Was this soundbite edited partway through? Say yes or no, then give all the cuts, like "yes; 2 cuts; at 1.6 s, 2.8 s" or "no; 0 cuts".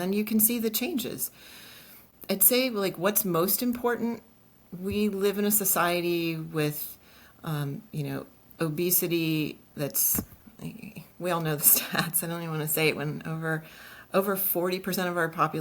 yes; 1 cut; at 2.1 s